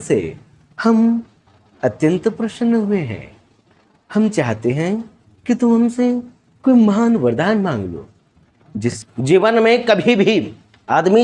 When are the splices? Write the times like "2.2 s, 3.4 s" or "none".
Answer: 9.0 s